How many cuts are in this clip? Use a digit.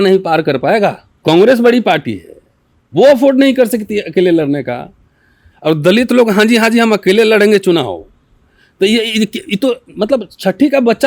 1